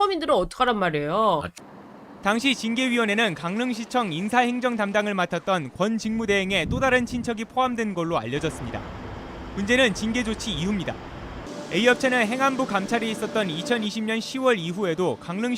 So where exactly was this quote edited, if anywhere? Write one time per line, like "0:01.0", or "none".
0:01.5